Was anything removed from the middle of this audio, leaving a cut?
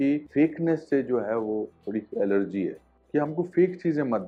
no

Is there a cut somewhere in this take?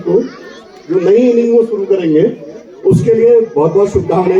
no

